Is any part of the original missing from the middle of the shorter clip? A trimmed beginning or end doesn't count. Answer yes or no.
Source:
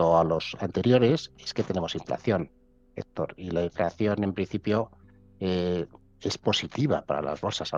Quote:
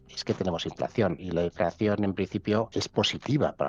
yes